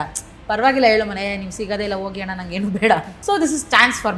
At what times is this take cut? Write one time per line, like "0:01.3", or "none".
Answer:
0:03.1